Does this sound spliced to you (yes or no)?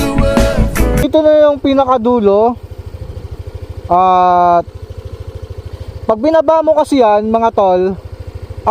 yes